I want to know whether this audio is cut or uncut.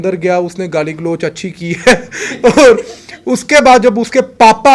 uncut